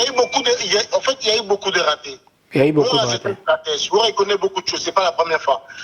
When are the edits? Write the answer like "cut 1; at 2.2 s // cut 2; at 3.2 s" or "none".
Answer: none

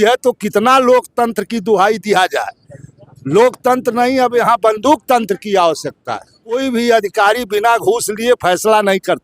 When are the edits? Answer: cut 1; at 6.5 s

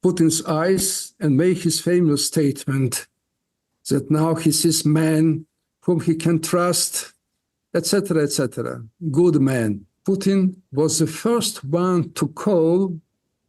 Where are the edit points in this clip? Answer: cut 1; at 9.9 s

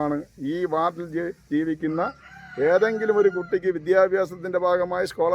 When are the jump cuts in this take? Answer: none

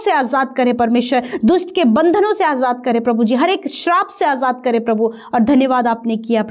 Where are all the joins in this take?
none

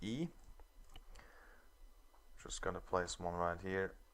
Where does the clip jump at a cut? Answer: cut 1; at 2.8 s

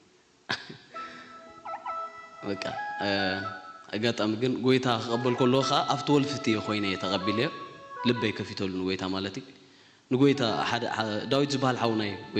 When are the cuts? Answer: none

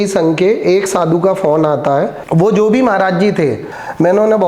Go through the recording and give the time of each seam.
cut 1; at 2.2 s // cut 2; at 3.6 s

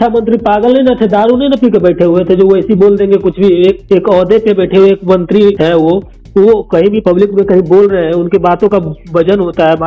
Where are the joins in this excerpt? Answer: none

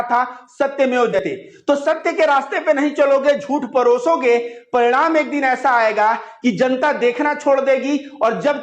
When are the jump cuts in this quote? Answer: cut 1; at 1.1 s

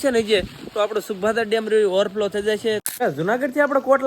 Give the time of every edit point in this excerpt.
cut 1; at 2.9 s

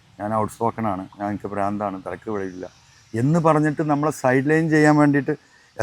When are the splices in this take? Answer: none

